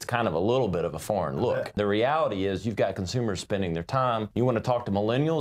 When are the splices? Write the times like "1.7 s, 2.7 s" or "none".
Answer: 1.8 s, 4.3 s